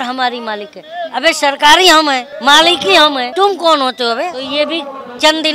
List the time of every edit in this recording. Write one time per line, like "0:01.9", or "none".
0:02.3
0:03.3
0:04.4